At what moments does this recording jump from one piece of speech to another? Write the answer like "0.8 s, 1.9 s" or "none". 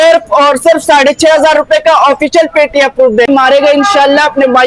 3.3 s